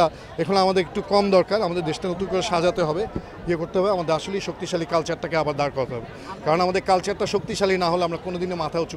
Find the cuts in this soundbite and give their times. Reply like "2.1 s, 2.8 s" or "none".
none